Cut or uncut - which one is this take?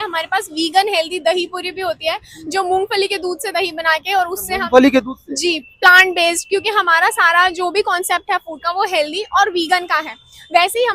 uncut